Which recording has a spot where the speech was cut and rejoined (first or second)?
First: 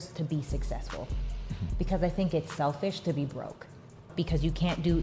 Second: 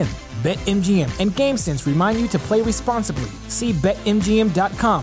first